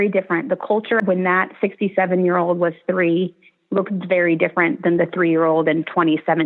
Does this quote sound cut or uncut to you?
cut